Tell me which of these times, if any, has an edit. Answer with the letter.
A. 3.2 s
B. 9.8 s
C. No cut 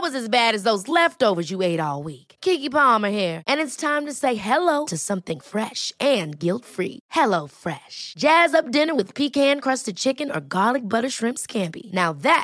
C